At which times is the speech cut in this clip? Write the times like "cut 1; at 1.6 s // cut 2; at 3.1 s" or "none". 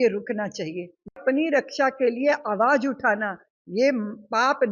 cut 1; at 1.1 s